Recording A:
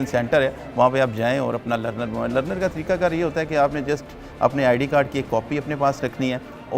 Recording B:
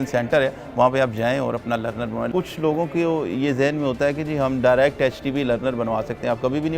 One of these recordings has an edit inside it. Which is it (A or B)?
B